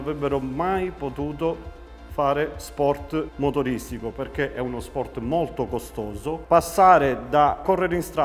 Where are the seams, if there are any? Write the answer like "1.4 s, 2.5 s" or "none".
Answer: 6.4 s